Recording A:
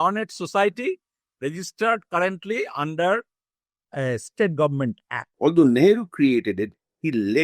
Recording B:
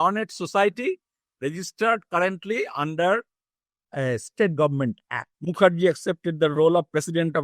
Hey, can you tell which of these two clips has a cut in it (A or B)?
A